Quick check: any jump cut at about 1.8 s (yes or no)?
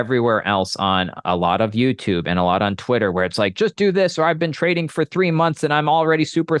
no